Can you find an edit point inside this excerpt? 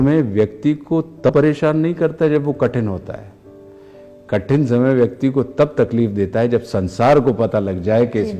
yes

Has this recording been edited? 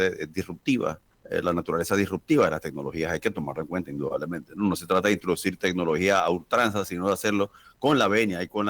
yes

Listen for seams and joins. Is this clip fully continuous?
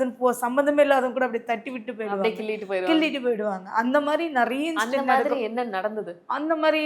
yes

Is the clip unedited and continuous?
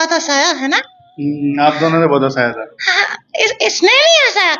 yes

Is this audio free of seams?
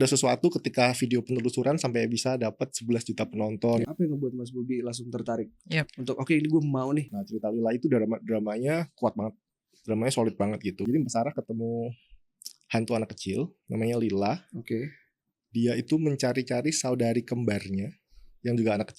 no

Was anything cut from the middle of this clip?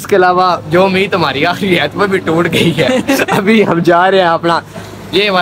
no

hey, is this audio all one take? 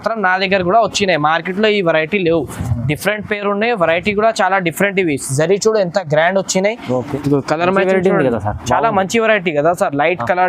no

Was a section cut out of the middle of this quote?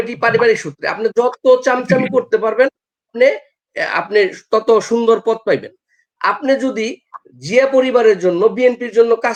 no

